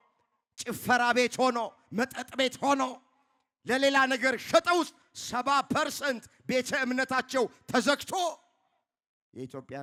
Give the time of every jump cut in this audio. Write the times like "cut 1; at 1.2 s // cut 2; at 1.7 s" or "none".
none